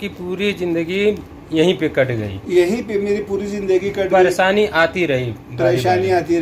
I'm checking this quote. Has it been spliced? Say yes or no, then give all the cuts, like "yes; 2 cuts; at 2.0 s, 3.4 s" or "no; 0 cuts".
no; 0 cuts